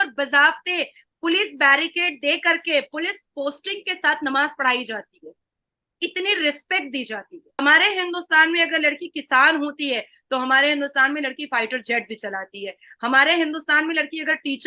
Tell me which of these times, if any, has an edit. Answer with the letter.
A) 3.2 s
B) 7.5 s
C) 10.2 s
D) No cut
B